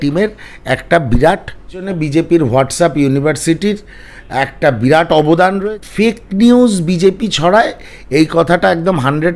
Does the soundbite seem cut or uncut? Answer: cut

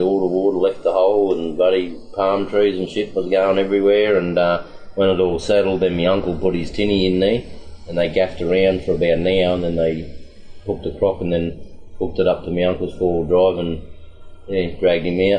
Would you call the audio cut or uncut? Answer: uncut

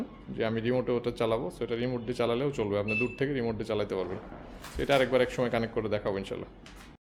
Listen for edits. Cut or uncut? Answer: uncut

